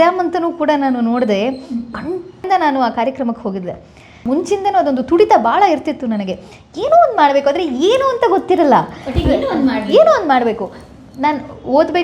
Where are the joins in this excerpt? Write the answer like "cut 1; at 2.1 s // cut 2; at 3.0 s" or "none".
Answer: cut 1; at 2.4 s // cut 2; at 4.2 s